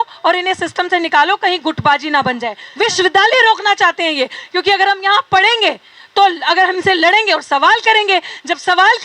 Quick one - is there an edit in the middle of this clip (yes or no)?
yes